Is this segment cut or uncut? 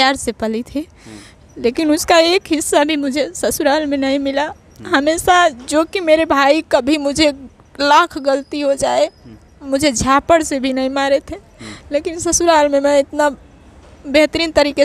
uncut